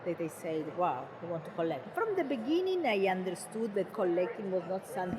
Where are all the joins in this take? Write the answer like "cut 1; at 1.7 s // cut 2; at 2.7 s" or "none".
cut 1; at 1.9 s // cut 2; at 3.9 s